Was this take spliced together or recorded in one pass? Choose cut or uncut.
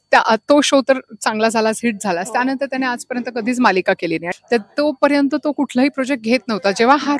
cut